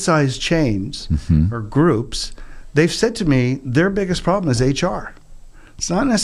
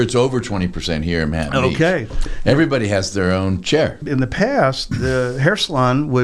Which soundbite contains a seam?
second; 1 cut; at 4.0 s

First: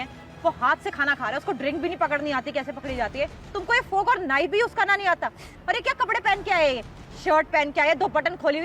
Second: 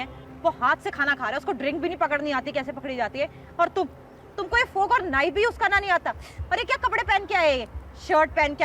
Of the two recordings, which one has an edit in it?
first; 1 cut; at 3.4 s

